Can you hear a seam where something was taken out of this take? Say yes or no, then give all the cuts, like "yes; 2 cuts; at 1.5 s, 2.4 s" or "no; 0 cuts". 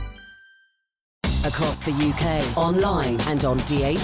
yes; 1 cut; at 1.2 s